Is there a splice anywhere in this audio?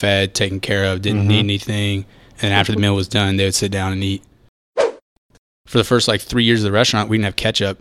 yes; 1 cut; at 5.0 s

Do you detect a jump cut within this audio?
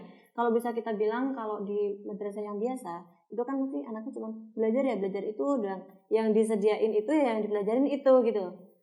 no; 0 cuts

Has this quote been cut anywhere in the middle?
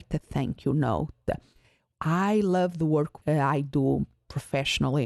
yes; 1 cut; at 1.8 s

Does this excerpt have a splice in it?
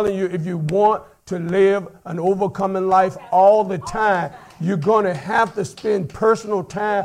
no; 0 cuts

